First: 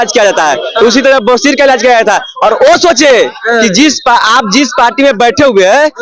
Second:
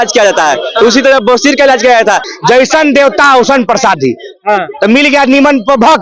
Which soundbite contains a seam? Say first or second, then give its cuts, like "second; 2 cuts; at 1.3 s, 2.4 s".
second; 1 cut; at 2.3 s